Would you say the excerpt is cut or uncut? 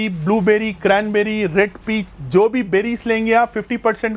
uncut